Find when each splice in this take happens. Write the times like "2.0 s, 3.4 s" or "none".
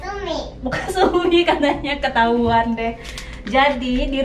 none